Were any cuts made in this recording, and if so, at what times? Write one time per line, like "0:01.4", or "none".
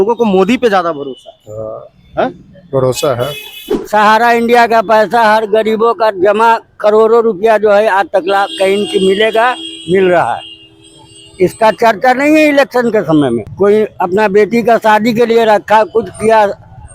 0:03.7
0:13.5